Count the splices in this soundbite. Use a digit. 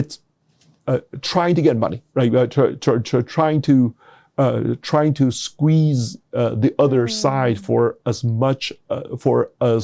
0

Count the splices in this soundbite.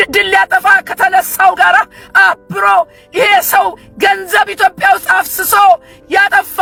0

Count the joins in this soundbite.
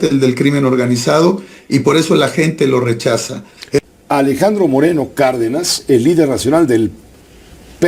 1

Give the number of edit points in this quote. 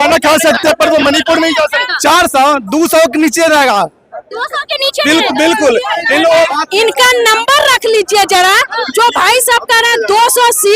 2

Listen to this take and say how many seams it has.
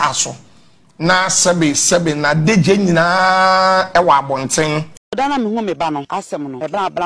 1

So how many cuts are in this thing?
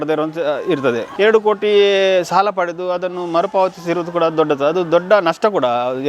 1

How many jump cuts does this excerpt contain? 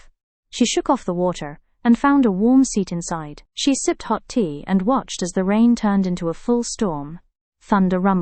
0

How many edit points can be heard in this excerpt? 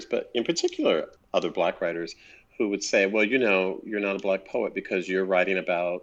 1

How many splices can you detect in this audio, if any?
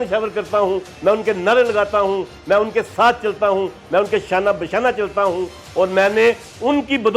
0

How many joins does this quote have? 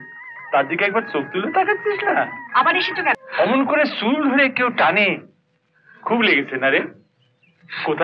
1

